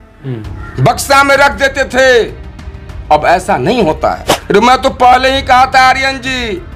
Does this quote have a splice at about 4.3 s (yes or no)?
yes